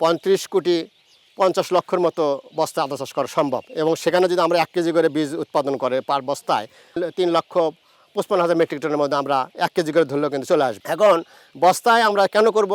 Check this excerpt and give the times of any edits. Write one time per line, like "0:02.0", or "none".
none